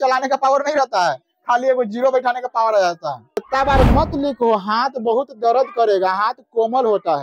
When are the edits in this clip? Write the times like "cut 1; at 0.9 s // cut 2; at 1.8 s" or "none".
cut 1; at 3.3 s